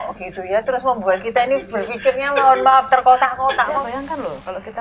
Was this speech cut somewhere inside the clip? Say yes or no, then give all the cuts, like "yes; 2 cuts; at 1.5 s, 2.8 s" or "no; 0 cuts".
yes; 1 cut; at 3.8 s